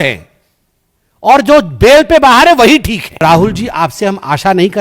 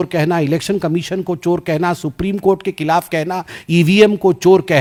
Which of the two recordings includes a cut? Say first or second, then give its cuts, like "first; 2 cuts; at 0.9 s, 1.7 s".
first; 1 cut; at 3.2 s